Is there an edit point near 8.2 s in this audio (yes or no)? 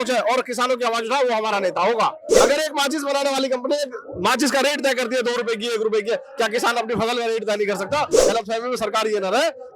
yes